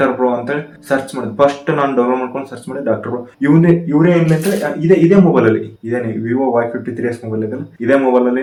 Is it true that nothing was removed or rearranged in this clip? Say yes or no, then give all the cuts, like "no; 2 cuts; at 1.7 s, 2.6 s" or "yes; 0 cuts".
yes; 0 cuts